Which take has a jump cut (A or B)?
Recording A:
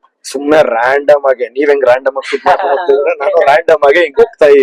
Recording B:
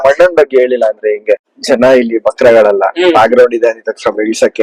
B